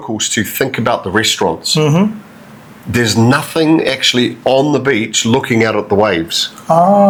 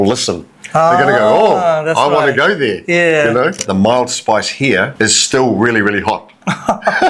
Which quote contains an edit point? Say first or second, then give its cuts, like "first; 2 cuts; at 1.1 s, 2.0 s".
second; 2 cuts; at 3.6 s, 4.9 s